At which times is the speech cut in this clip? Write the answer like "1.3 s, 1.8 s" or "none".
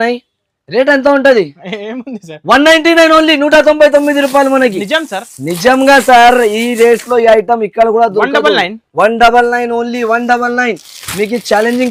none